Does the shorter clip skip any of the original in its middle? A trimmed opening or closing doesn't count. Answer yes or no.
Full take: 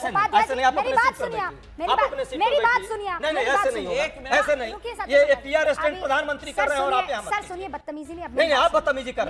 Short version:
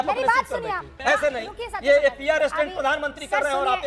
yes